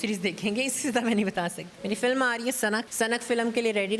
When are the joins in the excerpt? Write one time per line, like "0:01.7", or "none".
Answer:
0:01.6
0:02.9